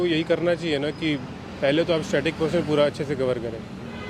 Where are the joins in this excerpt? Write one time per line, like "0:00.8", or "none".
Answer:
none